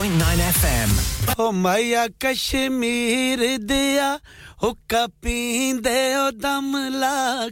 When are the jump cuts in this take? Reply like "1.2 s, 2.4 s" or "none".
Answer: 1.2 s

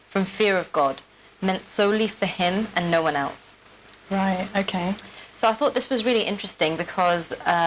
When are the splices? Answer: none

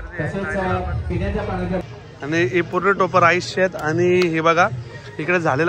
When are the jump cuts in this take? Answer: 1.8 s

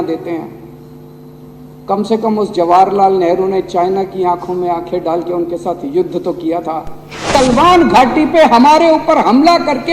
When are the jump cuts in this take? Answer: 7.3 s

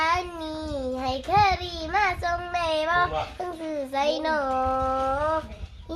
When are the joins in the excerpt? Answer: none

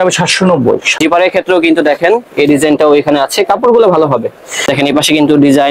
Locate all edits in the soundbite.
0.9 s, 4.6 s

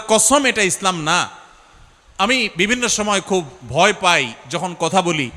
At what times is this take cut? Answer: none

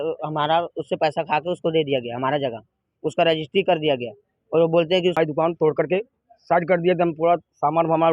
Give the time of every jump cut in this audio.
5.2 s

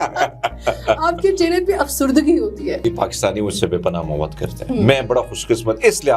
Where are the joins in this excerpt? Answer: 2.8 s

